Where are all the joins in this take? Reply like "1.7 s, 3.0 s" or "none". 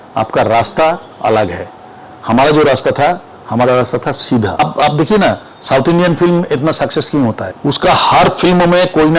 4.6 s, 7.5 s